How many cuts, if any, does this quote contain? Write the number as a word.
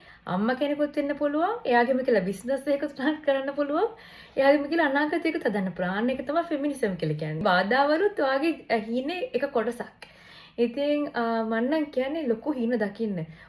one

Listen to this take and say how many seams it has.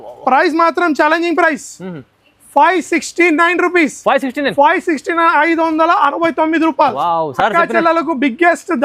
zero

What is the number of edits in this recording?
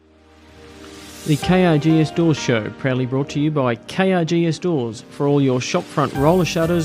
one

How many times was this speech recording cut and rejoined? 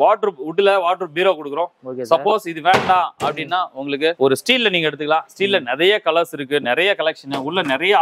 zero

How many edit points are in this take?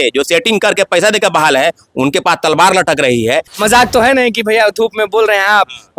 one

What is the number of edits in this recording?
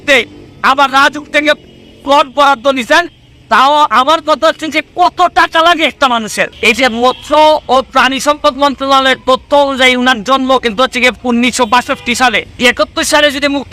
two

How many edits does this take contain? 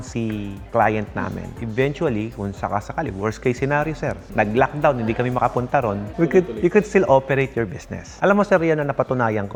zero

